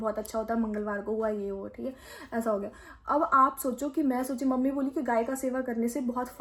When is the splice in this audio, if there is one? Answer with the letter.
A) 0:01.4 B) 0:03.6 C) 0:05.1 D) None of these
D